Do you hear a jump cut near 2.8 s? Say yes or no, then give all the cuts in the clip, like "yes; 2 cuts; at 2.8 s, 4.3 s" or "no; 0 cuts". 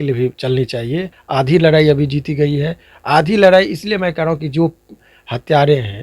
no; 1 cut; at 1.2 s